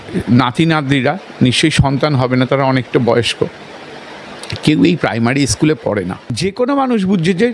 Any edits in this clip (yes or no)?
yes